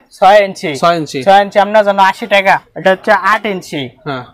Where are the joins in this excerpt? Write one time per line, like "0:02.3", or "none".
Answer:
0:02.7

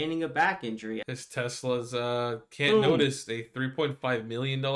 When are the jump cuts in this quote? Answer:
0:01.0

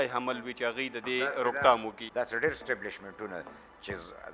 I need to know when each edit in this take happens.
0:02.0

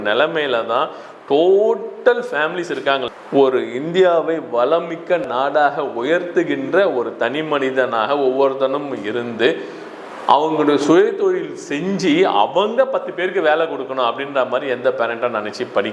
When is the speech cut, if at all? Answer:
0:03.0

